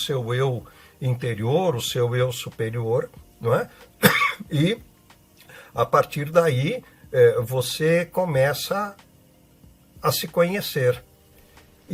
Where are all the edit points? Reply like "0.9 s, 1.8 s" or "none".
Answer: none